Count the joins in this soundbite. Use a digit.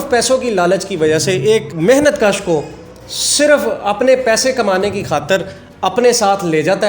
1